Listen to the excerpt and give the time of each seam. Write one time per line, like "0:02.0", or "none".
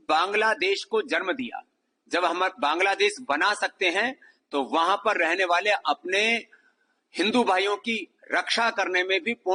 none